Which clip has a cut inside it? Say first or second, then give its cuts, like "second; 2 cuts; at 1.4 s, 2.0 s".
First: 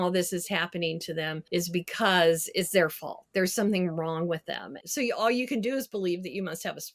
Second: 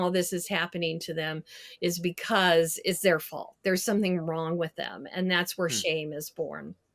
first; 2 cuts; at 1.4 s, 4.8 s